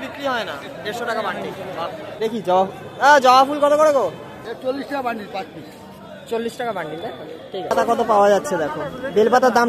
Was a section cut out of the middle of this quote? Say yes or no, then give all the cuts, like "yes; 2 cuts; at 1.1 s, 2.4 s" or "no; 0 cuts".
yes; 3 cuts; at 2.1 s, 4.4 s, 7.7 s